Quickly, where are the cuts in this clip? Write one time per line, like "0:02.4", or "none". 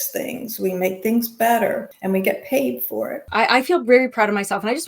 0:01.9
0:03.3